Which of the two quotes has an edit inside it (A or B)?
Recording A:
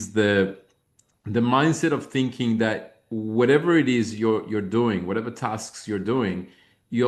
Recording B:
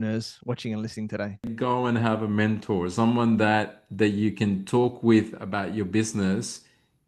B